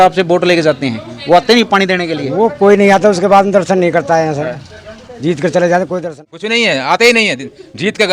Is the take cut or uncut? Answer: cut